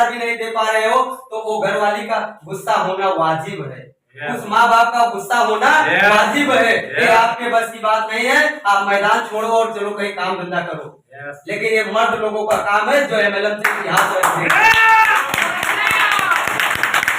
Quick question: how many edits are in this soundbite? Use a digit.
0